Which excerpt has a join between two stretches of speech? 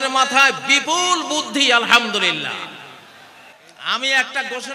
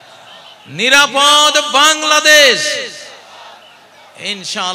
first; 1 cut; at 3.4 s

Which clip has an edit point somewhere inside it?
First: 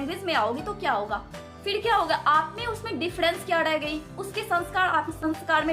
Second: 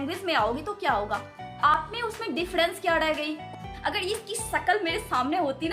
second; 2 cuts; at 1.7 s, 3.6 s

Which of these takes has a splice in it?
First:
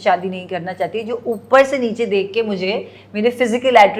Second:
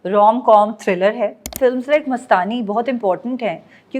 second; 1 cut; at 1.5 s

